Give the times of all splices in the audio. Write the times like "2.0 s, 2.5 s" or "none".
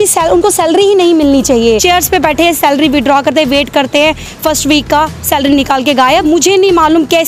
1.8 s, 6.2 s